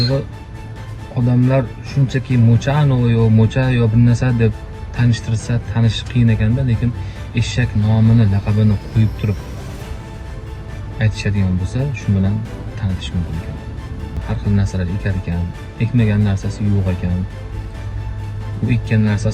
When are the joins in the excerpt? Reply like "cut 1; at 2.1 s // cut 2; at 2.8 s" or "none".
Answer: cut 1; at 14.2 s